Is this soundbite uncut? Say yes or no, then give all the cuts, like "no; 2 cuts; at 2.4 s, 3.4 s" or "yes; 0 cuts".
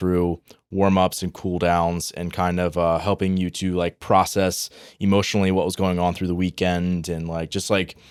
yes; 0 cuts